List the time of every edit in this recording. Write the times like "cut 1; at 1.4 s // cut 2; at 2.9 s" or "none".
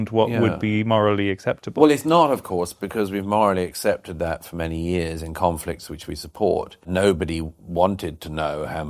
cut 1; at 5.2 s